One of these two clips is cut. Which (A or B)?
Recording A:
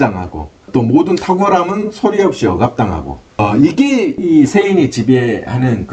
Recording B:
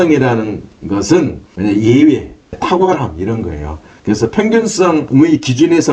B